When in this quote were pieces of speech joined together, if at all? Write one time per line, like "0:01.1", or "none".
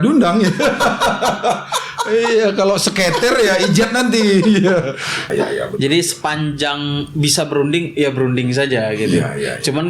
0:05.3